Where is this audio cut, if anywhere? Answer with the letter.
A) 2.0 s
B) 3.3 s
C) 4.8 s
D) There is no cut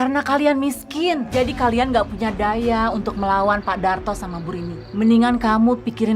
C